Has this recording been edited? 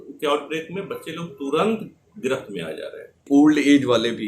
yes; 1 cut; at 3.2 s

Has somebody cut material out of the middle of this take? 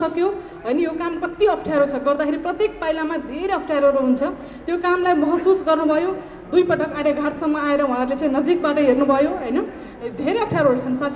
no; 0 cuts

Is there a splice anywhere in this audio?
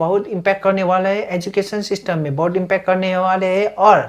no; 0 cuts

